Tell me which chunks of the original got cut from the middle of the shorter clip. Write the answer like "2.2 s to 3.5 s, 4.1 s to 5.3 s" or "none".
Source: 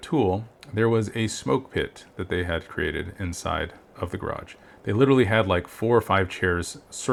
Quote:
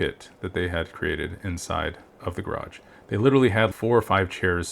5.5 s to 5.7 s